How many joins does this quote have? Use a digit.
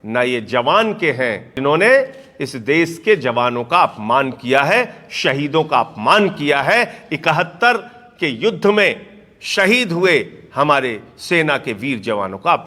1